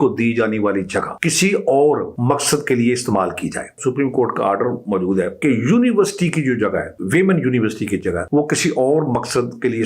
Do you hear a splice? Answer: yes; 6 cuts; at 1.1 s, 2.1 s, 3.8 s, 5.3 s, 6.9 s, 8.2 s

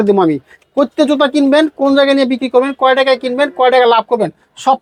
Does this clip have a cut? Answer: no; 0 cuts

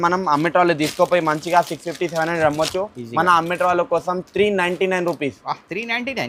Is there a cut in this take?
no; 0 cuts

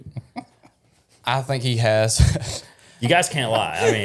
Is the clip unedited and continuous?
yes; 0 cuts

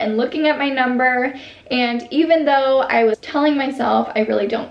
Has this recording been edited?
yes; 1 cut; at 3.2 s

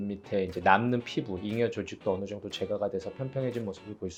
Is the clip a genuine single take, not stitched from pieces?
yes; 0 cuts

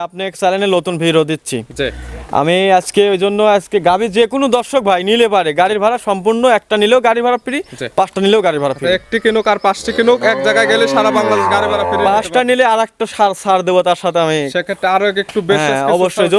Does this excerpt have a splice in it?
no; 0 cuts

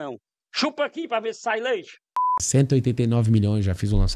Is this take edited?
yes; 1 cut; at 2.5 s

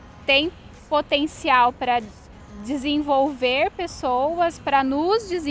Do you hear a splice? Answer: no; 0 cuts

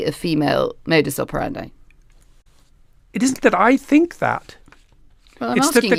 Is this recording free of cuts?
yes; 0 cuts

